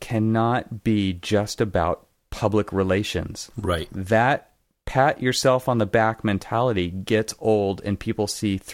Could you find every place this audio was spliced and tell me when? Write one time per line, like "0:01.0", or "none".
none